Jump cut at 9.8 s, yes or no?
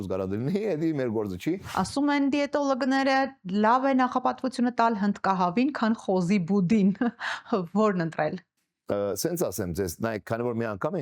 no